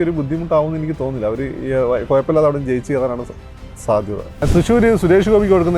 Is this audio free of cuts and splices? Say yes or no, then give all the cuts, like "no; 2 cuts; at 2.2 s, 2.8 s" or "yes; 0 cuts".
no; 1 cut; at 4.3 s